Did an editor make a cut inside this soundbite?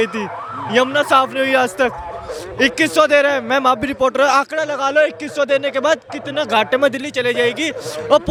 no; 0 cuts

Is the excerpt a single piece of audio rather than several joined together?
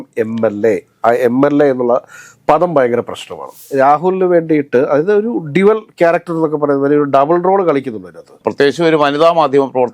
no; 1 cut; at 3.6 s

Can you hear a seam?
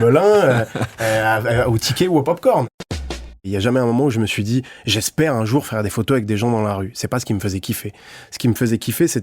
yes; 1 cut; at 3.4 s

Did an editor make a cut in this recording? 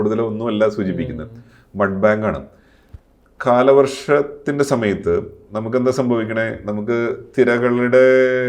no; 0 cuts

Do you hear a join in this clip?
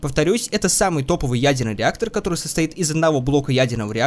no; 0 cuts

